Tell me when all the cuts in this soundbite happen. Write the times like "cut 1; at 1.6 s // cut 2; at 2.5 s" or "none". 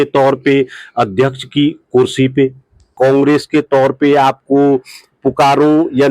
cut 1; at 2.9 s